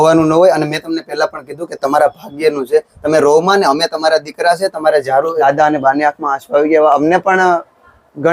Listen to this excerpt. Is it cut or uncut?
cut